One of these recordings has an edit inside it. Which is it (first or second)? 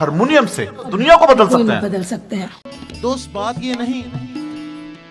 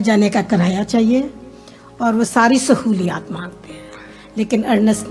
first